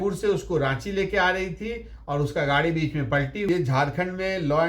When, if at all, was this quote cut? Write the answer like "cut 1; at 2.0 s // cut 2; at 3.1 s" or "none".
cut 1; at 3.5 s